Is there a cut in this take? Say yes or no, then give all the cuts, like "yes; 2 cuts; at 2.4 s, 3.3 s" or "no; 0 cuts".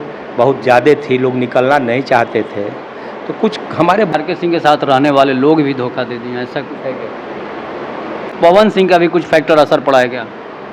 yes; 2 cuts; at 4.1 s, 8.3 s